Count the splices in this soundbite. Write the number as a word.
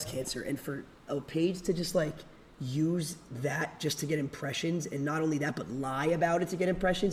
zero